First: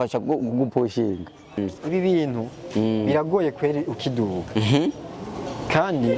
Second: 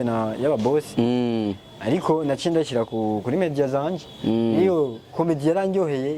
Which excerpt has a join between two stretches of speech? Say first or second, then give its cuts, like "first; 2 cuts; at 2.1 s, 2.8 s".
first; 1 cut; at 1.6 s